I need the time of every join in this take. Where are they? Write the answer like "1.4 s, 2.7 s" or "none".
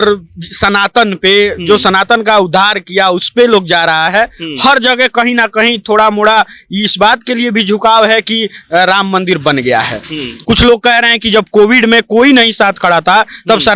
10.3 s